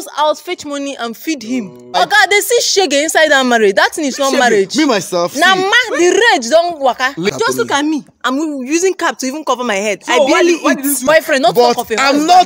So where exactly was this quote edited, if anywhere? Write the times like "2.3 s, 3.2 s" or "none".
2.0 s, 7.3 s, 11.1 s